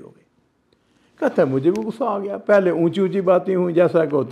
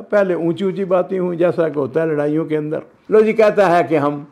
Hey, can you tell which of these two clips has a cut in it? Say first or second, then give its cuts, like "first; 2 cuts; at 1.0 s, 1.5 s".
second; 1 cut; at 2.9 s